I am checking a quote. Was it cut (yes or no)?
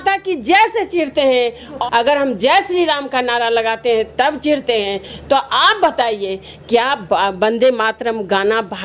no